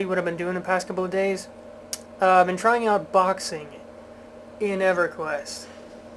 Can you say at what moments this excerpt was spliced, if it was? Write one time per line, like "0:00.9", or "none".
0:02.3